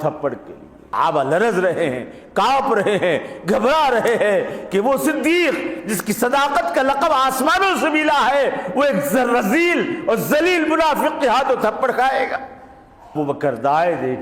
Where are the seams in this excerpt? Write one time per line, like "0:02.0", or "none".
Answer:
0:00.9
0:13.1